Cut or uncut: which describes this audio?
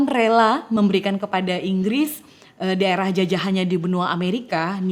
uncut